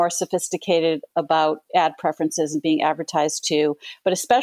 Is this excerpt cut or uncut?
uncut